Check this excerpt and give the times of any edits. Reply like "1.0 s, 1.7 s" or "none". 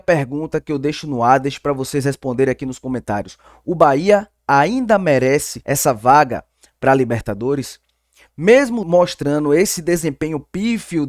5.5 s, 8.8 s